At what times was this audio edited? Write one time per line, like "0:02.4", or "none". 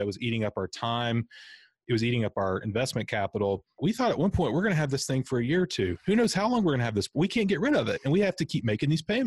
0:03.8